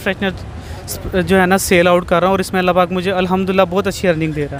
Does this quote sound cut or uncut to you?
uncut